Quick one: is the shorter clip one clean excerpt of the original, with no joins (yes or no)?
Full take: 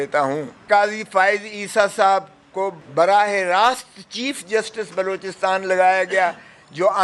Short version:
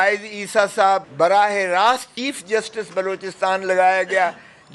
no